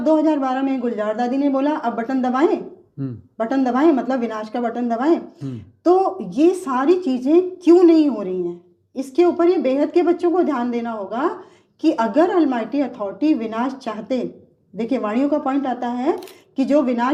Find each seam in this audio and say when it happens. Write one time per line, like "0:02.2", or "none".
none